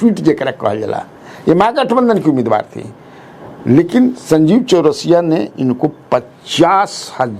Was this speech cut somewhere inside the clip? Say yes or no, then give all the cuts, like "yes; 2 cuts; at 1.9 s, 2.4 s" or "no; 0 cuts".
no; 0 cuts